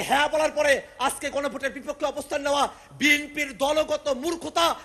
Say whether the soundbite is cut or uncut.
uncut